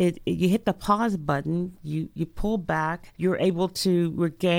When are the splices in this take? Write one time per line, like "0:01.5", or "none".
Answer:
0:03.1